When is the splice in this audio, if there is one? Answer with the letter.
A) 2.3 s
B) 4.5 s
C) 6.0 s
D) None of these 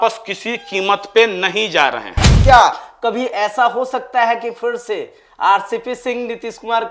A